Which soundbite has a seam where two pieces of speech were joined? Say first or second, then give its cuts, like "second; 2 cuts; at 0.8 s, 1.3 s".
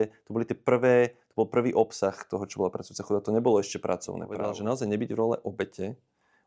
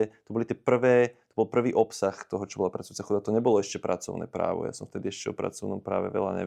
first; 1 cut; at 4.4 s